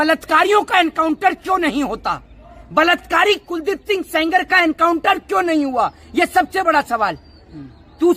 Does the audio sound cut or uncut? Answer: uncut